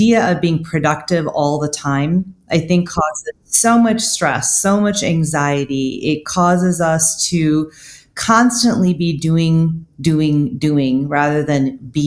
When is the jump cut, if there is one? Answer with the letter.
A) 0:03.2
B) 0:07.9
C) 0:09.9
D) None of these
A